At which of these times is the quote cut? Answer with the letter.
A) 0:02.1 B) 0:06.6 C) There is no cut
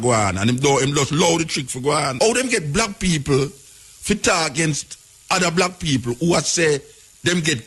A